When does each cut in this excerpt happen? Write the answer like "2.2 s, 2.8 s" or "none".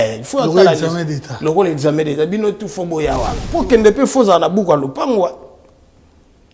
3.4 s